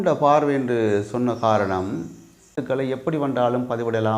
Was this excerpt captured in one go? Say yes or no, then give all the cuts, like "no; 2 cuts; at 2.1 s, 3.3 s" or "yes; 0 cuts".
no; 1 cut; at 2.7 s